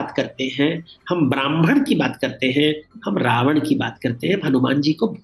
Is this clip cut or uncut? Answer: uncut